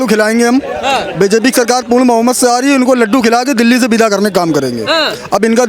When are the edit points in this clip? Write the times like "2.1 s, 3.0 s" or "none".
none